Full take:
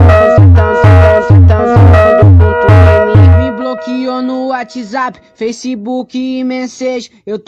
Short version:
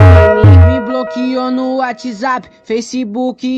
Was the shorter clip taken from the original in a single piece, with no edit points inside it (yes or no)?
yes